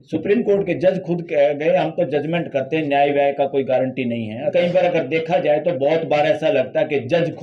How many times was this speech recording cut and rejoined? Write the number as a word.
one